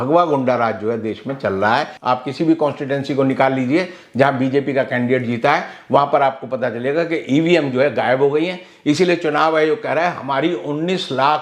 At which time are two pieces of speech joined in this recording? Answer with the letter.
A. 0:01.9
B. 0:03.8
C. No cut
A